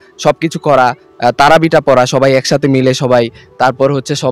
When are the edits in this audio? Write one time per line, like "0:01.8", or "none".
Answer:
none